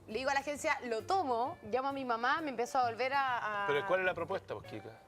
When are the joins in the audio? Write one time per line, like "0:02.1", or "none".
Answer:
0:04.1

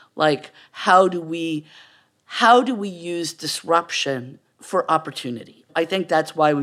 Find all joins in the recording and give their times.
0:05.7

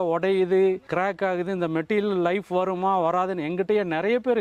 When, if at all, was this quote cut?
none

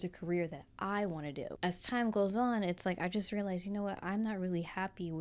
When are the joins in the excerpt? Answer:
0:01.5

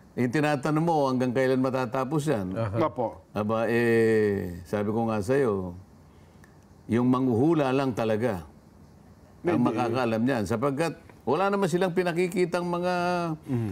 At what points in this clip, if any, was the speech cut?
none

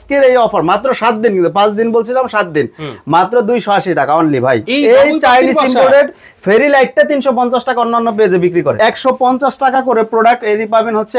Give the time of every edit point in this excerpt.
0:08.8

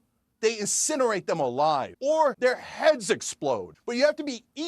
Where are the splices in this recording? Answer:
0:02.3
0:03.8

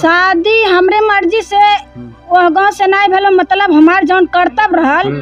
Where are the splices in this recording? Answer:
none

